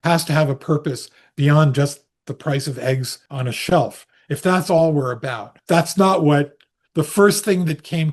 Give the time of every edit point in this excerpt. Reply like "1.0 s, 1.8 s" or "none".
3.2 s, 5.5 s